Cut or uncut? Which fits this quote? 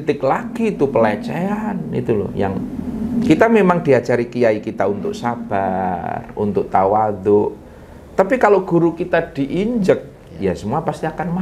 uncut